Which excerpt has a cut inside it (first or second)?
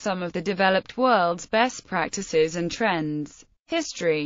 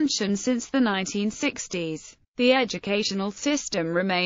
second